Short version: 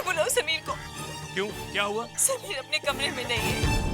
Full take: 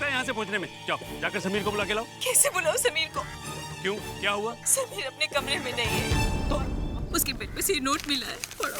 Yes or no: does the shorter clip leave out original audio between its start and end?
no